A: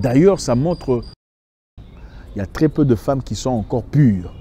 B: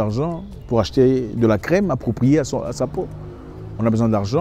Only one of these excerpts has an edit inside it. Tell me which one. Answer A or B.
A